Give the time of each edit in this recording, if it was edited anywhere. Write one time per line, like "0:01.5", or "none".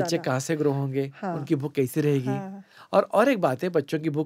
none